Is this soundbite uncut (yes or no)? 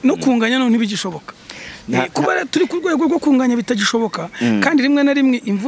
yes